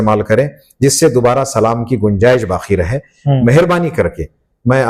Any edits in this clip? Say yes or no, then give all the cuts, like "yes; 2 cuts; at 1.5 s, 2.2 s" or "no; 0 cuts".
no; 0 cuts